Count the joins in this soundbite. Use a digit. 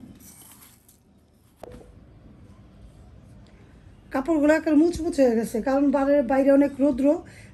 1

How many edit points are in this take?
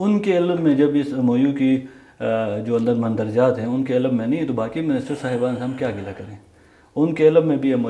0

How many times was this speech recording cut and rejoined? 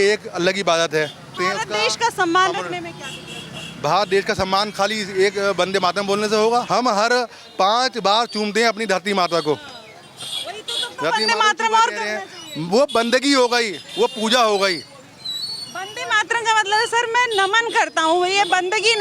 2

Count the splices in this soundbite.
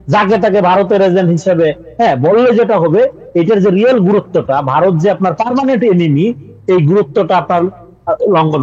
0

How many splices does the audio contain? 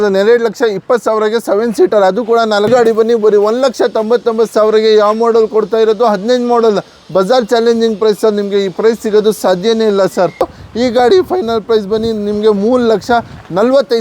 2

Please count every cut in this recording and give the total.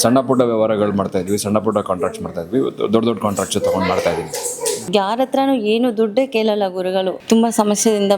2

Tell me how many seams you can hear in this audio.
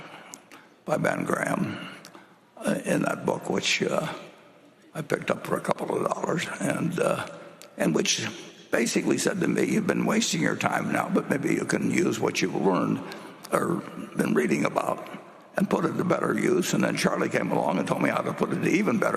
0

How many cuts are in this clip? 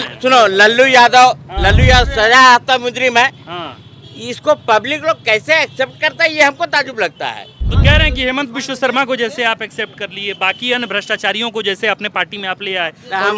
1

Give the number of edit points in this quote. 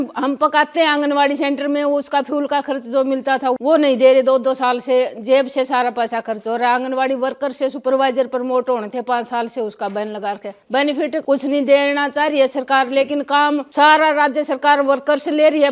0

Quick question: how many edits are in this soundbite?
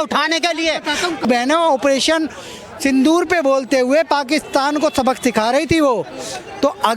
1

